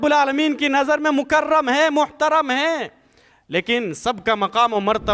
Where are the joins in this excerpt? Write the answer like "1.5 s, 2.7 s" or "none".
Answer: none